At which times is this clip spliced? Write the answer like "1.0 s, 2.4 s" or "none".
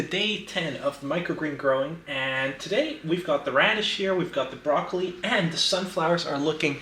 none